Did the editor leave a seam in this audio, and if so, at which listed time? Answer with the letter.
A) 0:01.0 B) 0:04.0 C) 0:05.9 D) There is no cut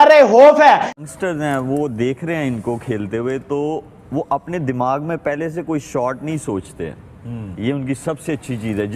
A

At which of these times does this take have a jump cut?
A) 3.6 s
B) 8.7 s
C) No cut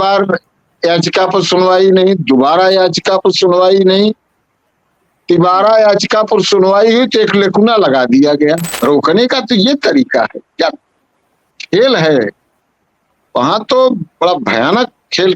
B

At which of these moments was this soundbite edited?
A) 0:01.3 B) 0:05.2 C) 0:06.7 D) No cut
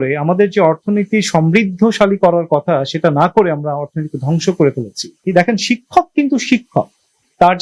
B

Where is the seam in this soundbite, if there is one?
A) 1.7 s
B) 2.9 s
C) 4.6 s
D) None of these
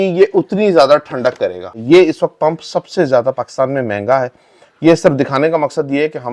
A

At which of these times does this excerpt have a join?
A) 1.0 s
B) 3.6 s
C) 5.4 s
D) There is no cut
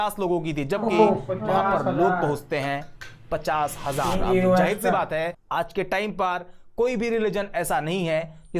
C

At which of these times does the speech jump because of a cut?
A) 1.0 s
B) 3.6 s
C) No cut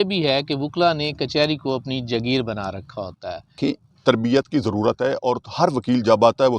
B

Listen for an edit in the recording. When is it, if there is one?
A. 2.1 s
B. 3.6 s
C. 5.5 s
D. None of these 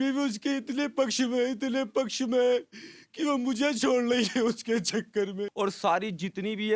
C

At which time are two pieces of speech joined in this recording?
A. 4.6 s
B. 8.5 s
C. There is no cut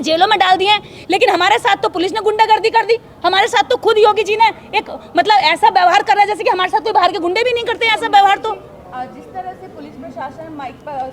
C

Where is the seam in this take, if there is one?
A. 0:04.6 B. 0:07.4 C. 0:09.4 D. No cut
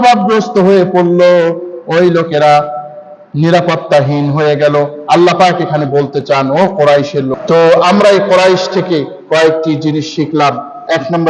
B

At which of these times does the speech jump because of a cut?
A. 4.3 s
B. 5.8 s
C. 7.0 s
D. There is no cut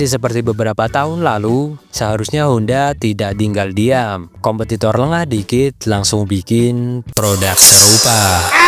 A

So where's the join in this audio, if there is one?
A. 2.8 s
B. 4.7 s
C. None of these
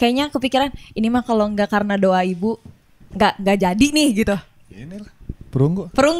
C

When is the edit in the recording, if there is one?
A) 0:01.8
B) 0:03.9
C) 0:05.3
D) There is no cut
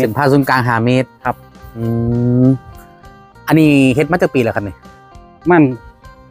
A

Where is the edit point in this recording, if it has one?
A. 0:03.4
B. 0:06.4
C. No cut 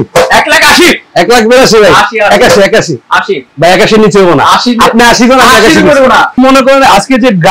B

